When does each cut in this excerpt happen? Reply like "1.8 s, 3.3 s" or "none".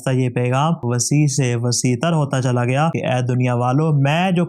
2.9 s